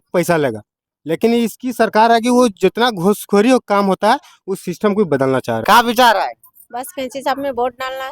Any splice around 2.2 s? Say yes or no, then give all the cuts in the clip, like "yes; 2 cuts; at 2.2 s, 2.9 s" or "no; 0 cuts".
no; 1 cut; at 5.6 s